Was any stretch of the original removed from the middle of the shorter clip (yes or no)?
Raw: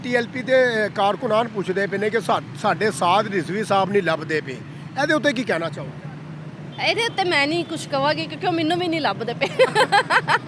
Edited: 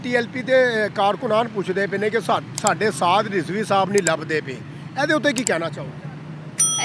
no